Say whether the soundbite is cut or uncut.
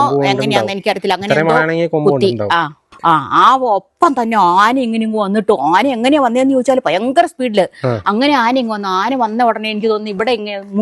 cut